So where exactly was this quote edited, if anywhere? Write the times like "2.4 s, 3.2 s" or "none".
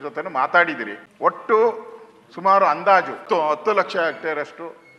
1.0 s, 3.2 s